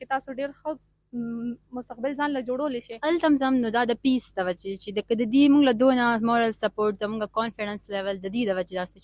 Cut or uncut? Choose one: cut